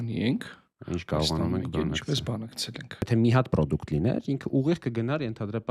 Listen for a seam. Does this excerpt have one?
yes; 1 cut; at 3.1 s

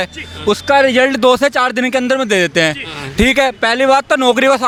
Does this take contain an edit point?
no; 0 cuts

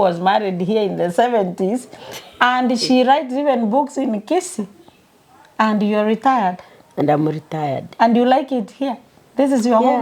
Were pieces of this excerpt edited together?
no; 0 cuts

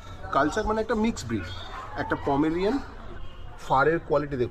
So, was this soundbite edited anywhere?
yes; 1 cut; at 3.1 s

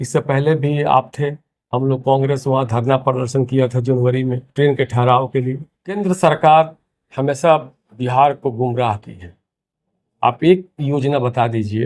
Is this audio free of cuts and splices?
no; 1 cut; at 6.0 s

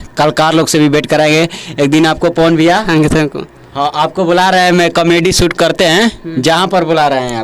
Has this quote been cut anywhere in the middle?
no; 0 cuts

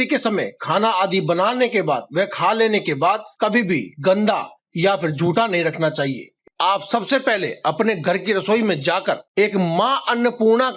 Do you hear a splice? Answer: yes; 1 cut; at 6.4 s

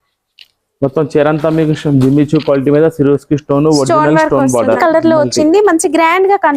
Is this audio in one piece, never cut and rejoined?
no; 1 cut; at 4.8 s

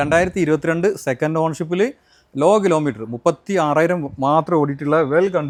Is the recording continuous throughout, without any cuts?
yes; 0 cuts

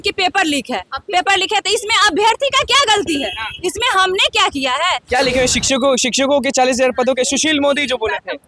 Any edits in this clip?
yes; 1 cut; at 5.0 s

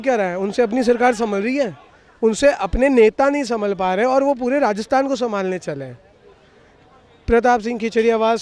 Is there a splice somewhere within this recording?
no; 0 cuts

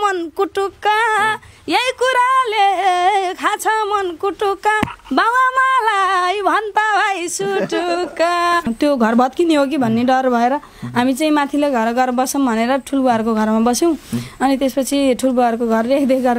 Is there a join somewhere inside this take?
yes; 1 cut; at 8.7 s

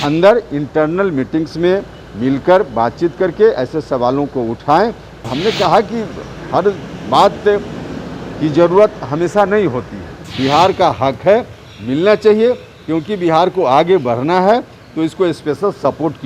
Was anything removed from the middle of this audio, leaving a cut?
yes; 2 cuts; at 5.2 s, 10.1 s

